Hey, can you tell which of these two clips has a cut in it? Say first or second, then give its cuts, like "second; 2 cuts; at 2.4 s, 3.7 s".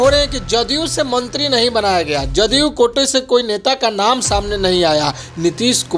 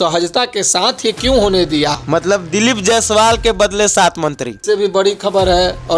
second; 2 cuts; at 2.0 s, 4.6 s